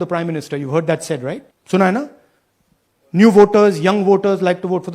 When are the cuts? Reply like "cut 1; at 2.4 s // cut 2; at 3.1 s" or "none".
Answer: cut 1; at 1.5 s

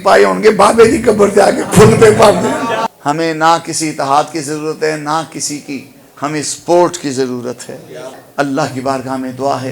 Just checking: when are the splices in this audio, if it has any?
cut 1; at 2.9 s // cut 2; at 8.2 s

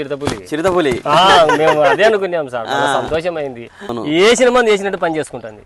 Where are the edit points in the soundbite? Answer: cut 1; at 4.0 s

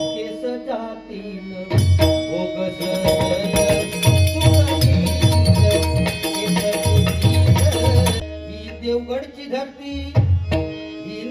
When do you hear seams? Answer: cut 1; at 8.2 s

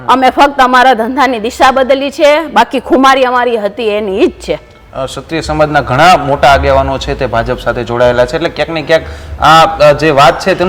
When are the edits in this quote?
none

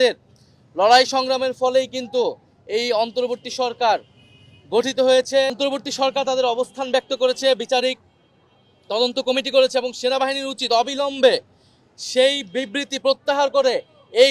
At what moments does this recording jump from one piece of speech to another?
cut 1; at 5.5 s

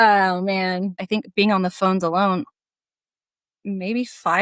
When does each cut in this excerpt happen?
cut 1; at 1.0 s

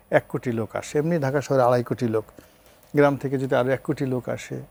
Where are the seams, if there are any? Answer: none

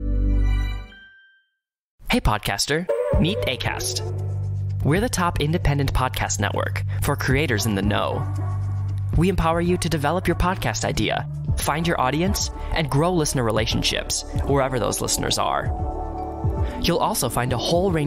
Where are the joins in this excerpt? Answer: cut 1; at 1.9 s

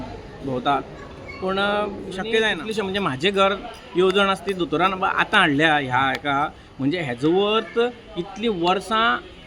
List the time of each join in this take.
cut 1; at 2.6 s

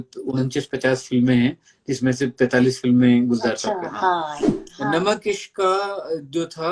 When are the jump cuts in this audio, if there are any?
cut 1; at 4.4 s

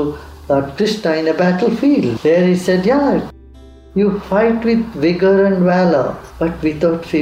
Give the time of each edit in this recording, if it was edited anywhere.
cut 1; at 2.1 s // cut 2; at 3.3 s // cut 3; at 6.2 s

